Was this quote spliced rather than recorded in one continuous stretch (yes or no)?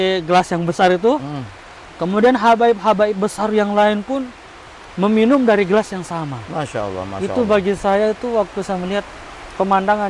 no